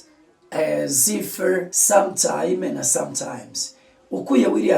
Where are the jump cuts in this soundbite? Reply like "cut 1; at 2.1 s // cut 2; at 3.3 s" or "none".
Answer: cut 1; at 1.7 s